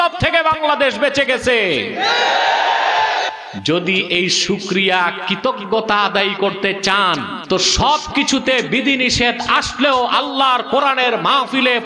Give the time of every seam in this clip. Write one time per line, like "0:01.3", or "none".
0:07.3